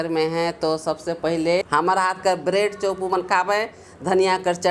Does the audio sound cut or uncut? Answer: cut